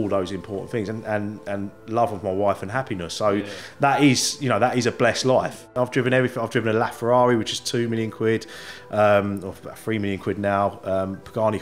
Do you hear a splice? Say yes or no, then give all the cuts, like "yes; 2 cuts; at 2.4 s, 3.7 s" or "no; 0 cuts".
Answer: yes; 1 cut; at 5.7 s